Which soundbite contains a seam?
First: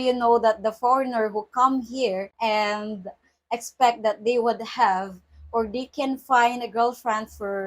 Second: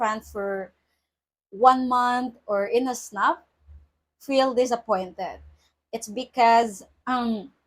first; 1 cut; at 2.3 s

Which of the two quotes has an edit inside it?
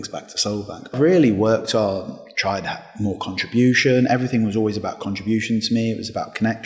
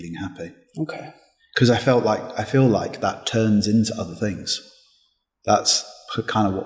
first; 1 cut; at 0.9 s

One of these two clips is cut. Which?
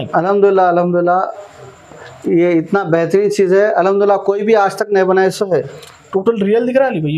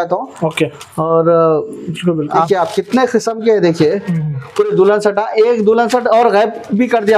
second; 1 cut; at 2.4 s

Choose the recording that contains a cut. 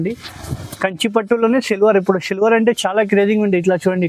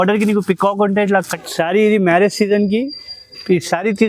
second; 1 cut; at 1.3 s

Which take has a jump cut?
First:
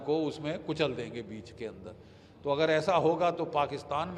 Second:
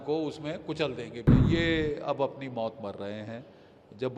second; 1 cut; at 1.3 s

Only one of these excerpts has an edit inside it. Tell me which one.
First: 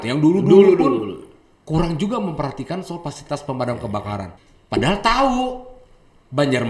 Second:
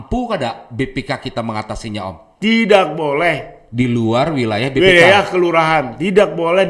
second; 1 cut; at 2.3 s

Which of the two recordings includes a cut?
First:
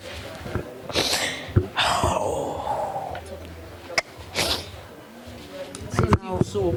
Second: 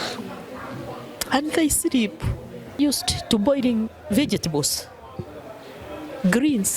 second; 1 cut; at 2.8 s

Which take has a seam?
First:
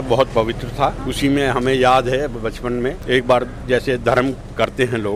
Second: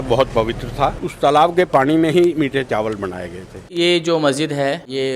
second; 2 cuts; at 1.0 s, 3.7 s

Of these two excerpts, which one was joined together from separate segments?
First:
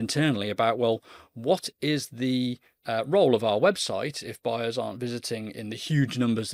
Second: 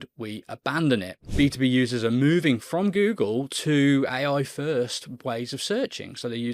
second; 1 cut; at 1.2 s

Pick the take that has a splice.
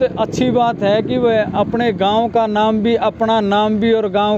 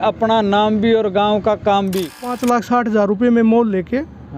second; 1 cut; at 2.4 s

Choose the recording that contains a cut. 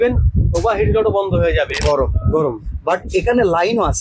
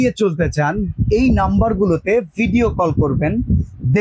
first; 1 cut; at 1.8 s

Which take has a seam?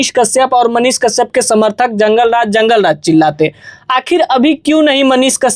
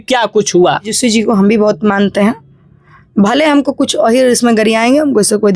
second; 1 cut; at 0.9 s

